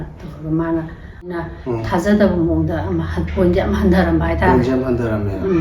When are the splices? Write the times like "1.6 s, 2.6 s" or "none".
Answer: 1.3 s